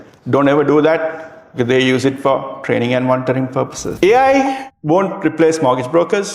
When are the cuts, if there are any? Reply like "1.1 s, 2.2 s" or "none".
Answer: 3.8 s, 4.7 s

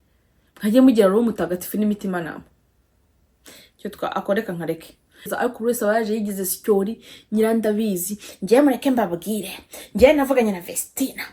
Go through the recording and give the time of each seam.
5.3 s

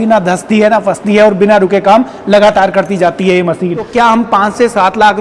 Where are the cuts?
3.9 s

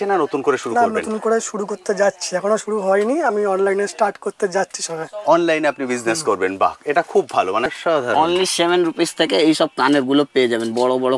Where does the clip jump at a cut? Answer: 7.6 s

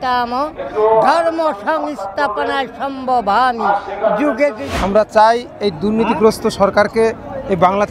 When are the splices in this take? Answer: 4.6 s

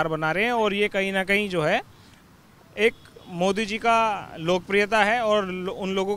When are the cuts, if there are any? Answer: none

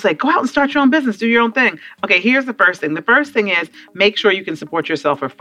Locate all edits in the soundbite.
none

